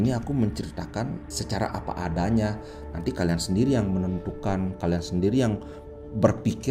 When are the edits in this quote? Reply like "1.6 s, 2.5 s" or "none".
1.3 s